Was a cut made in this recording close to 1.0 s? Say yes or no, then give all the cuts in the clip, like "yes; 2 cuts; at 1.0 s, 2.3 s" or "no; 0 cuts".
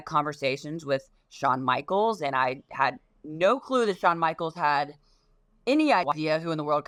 no; 0 cuts